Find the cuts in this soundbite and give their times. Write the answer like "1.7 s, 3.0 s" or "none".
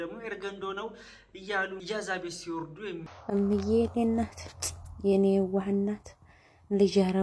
1.8 s, 3.3 s